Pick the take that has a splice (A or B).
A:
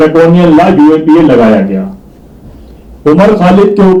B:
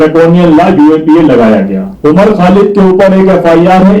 B